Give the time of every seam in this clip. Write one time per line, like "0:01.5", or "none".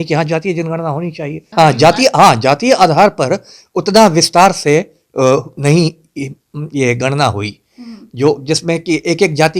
0:01.4

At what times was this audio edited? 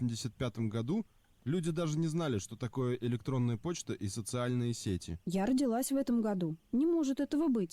0:05.2

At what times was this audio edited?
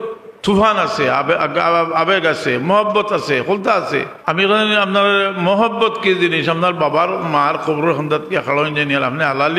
0:04.1

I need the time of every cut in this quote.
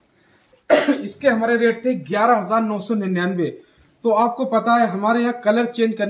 none

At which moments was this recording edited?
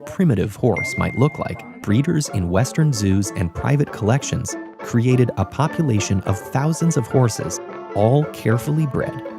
0:01.6

